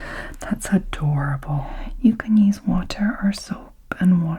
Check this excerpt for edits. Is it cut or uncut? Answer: cut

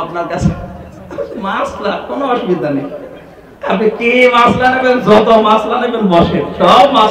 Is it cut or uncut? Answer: uncut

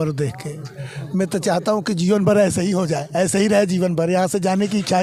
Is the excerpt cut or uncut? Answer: uncut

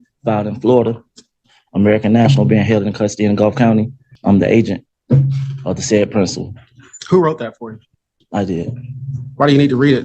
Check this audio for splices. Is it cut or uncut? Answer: cut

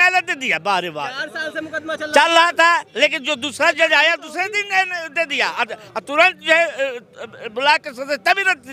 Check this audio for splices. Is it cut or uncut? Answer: uncut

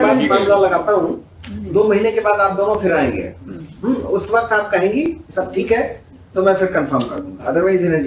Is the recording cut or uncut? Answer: uncut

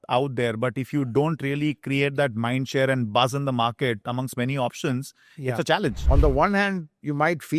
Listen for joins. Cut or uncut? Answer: cut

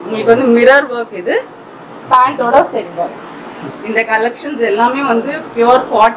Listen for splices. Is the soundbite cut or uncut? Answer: cut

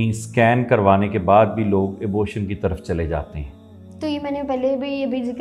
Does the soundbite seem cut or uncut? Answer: uncut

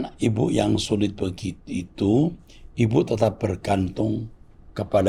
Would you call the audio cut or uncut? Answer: uncut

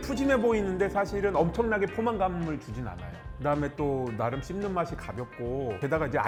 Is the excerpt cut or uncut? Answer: uncut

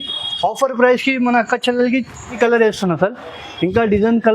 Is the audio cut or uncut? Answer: cut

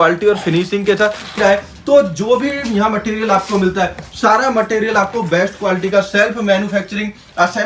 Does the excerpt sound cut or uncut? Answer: cut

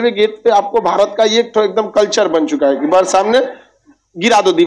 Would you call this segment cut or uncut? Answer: uncut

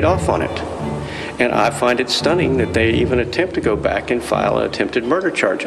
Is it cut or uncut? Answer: uncut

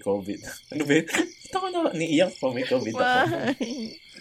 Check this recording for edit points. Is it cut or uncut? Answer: uncut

